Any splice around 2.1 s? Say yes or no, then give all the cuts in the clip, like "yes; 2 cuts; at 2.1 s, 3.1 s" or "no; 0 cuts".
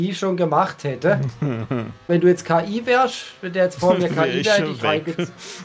yes; 1 cut; at 2.1 s